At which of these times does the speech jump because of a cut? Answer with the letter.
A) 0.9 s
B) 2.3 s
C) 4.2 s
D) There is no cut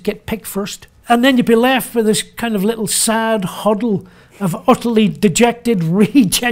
A